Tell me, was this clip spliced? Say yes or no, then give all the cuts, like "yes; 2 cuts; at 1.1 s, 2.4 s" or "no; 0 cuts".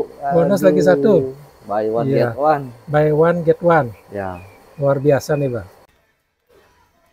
no; 0 cuts